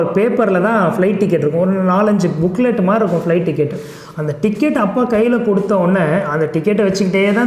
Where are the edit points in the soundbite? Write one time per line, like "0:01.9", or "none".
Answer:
none